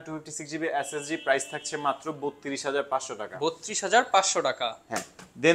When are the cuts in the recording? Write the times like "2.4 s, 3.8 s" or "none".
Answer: none